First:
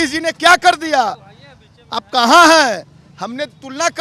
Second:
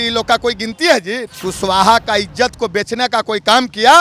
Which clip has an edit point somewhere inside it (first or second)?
second